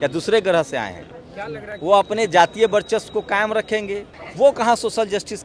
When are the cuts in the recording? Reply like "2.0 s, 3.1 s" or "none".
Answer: 4.2 s